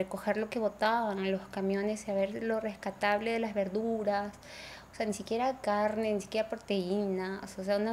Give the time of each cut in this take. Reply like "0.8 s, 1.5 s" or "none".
none